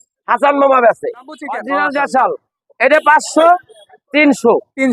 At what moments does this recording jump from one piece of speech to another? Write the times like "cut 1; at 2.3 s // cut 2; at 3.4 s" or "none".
cut 1; at 1.5 s